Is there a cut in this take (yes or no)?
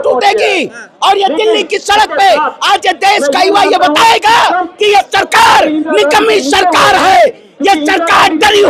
no